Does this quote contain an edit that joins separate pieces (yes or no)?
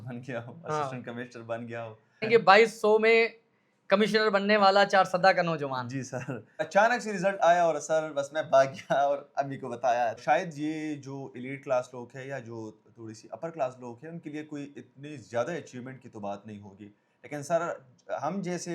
yes